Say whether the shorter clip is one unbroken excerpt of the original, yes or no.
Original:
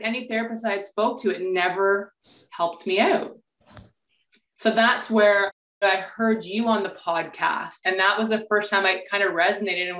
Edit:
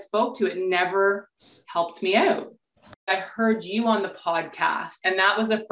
no